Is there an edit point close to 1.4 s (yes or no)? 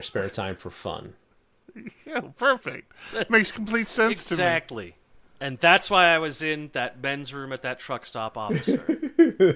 no